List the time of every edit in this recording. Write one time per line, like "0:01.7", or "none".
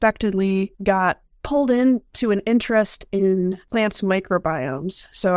0:03.6